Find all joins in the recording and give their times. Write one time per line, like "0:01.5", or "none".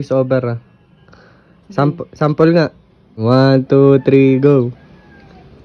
0:03.2